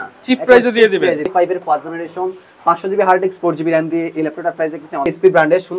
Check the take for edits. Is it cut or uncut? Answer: cut